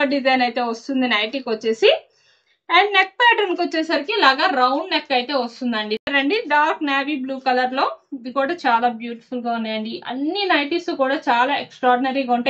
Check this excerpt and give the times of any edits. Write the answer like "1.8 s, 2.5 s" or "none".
6.0 s